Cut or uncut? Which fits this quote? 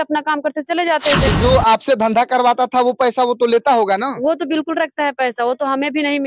cut